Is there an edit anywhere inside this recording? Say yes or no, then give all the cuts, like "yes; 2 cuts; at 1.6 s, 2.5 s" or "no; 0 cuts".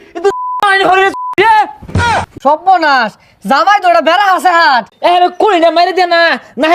yes; 2 cuts; at 2.1 s, 4.9 s